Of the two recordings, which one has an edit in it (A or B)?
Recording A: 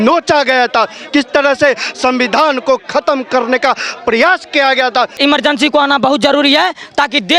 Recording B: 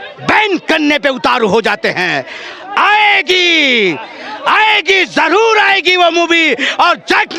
A